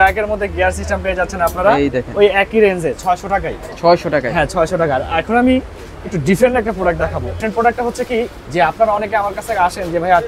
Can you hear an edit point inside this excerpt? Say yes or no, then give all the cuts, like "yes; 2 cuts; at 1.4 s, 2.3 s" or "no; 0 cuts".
no; 0 cuts